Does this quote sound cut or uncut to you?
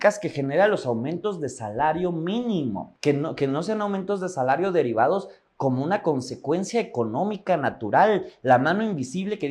uncut